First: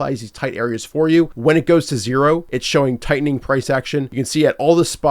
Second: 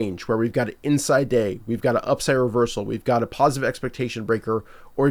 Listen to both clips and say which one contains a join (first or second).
first